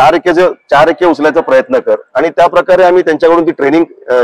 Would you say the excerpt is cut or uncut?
uncut